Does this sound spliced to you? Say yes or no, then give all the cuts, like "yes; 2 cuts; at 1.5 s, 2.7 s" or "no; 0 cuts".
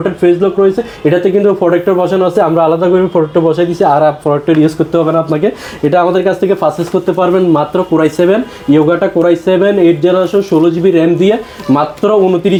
no; 0 cuts